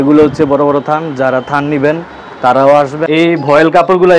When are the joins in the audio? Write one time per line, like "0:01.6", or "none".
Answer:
0:03.0